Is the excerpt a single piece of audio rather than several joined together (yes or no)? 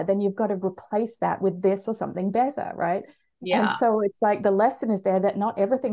no